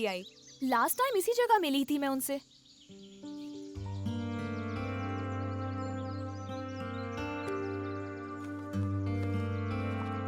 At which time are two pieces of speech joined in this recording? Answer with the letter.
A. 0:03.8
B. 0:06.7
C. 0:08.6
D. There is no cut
A